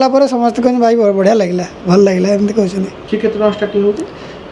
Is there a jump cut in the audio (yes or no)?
yes